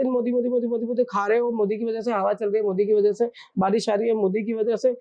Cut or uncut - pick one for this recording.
uncut